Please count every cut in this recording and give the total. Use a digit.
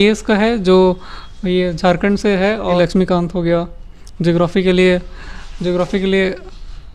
1